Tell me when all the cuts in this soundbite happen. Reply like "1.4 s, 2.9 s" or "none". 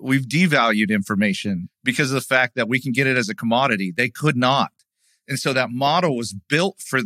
1.7 s